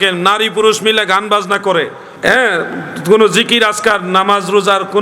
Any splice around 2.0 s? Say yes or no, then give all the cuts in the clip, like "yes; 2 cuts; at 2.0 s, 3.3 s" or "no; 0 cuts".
yes; 1 cut; at 2.0 s